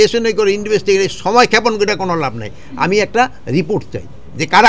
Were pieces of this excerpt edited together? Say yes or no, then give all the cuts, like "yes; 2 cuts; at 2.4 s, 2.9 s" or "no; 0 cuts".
no; 0 cuts